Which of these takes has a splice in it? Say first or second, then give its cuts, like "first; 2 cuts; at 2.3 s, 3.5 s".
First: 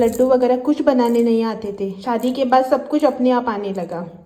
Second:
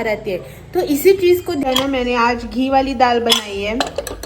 second; 1 cut; at 1.6 s